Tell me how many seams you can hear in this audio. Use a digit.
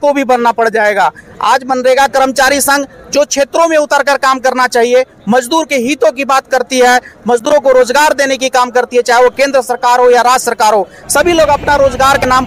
0